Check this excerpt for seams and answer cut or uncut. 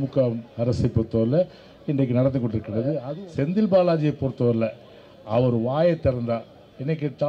cut